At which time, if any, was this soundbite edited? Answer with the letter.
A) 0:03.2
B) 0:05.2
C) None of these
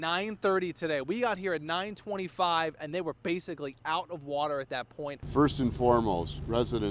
B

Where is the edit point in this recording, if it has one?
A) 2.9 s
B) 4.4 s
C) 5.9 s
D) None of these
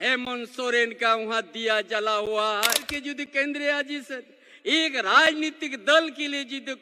A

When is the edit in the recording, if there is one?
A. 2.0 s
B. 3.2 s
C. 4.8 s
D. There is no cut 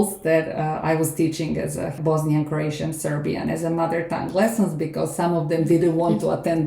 A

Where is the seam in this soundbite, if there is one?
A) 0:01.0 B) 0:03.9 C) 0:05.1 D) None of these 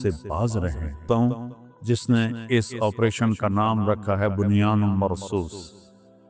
A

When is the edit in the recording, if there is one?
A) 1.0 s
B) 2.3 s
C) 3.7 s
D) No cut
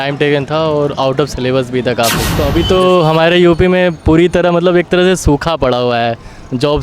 B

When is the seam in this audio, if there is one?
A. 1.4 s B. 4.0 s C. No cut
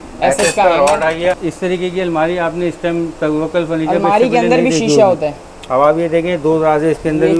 A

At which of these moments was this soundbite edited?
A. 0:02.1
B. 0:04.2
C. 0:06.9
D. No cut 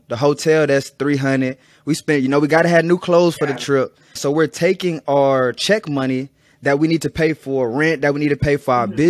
B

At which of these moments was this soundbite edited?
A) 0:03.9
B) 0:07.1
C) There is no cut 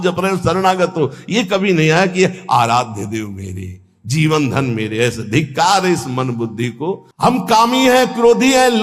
B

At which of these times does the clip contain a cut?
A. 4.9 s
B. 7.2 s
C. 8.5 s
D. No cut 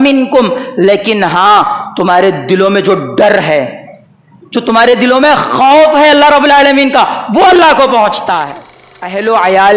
C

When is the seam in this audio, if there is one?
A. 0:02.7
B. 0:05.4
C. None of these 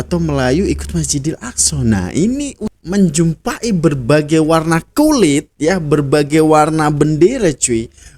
A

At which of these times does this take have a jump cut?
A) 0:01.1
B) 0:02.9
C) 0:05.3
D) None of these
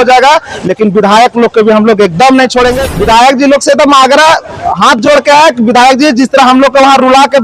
B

